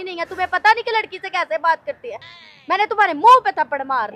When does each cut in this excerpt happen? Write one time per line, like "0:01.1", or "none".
none